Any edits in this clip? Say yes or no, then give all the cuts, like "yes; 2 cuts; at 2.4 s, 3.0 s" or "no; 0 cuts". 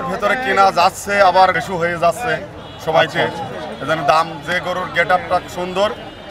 yes; 1 cut; at 1.7 s